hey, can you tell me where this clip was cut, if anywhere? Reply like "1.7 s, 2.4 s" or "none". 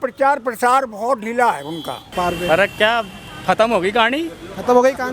2.1 s